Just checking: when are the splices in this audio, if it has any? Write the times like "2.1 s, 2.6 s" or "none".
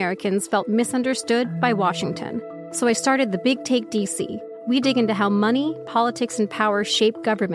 2.6 s, 4.5 s

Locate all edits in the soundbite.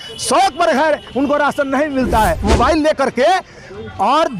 2.4 s

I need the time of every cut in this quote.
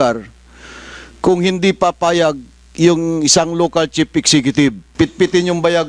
4.8 s

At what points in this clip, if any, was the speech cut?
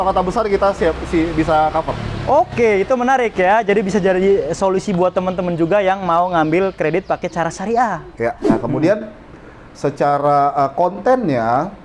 8.4 s

